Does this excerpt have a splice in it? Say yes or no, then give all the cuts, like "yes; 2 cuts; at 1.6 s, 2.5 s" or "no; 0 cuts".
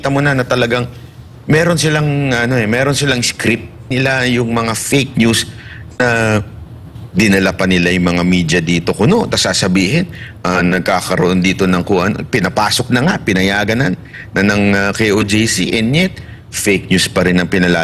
yes; 1 cut; at 3.9 s